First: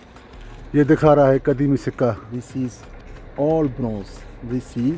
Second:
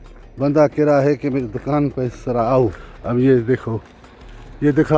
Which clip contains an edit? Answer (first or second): second